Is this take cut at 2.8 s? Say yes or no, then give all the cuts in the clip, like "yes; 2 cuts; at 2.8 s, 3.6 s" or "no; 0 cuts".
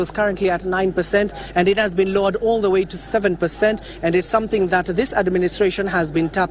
no; 1 cut; at 4.8 s